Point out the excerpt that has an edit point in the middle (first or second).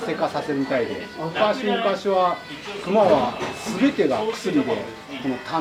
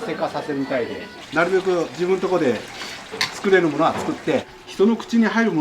second